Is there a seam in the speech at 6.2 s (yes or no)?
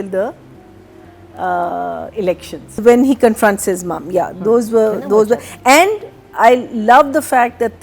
no